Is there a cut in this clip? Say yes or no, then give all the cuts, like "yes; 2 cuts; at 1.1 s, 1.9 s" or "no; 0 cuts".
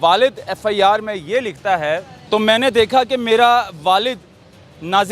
yes; 1 cut; at 2.1 s